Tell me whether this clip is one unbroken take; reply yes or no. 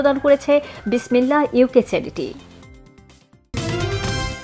no